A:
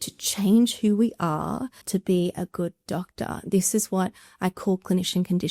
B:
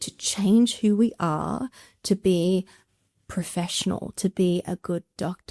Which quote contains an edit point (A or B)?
A